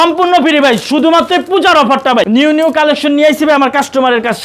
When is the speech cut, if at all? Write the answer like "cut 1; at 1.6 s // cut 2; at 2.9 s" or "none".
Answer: cut 1; at 2.2 s